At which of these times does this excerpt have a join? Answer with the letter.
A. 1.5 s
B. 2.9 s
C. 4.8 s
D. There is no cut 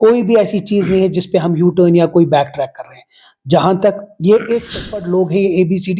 C